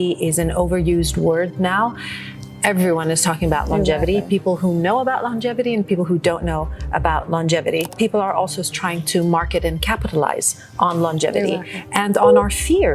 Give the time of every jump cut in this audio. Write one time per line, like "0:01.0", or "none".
0:07.9